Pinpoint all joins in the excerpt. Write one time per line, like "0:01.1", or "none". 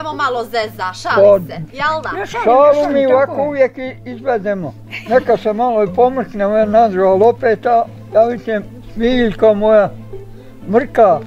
none